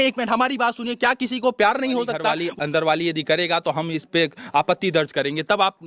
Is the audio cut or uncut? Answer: cut